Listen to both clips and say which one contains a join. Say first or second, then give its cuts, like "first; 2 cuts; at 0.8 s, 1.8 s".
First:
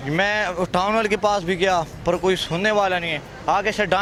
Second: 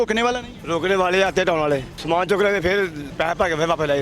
second; 2 cuts; at 1.9 s, 3.0 s